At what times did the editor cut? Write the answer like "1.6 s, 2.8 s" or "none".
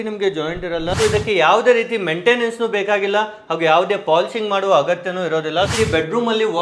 0.9 s, 5.7 s